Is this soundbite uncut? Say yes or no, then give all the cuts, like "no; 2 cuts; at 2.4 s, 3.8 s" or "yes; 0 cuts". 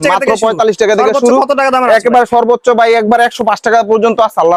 yes; 0 cuts